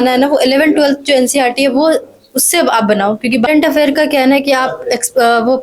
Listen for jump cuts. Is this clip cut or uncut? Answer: cut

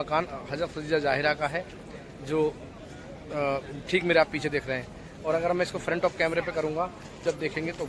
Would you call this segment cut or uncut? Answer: uncut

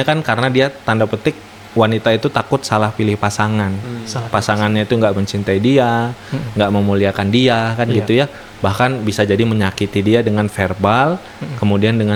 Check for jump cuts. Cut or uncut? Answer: uncut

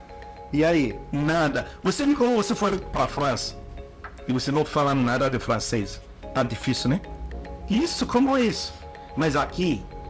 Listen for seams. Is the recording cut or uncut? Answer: uncut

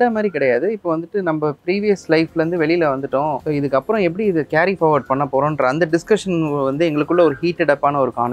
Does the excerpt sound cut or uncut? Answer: cut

